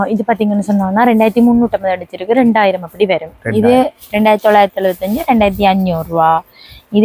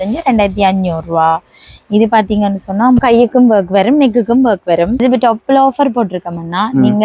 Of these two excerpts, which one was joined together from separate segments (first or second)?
second